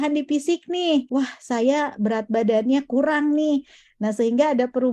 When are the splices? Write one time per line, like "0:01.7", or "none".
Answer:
0:01.1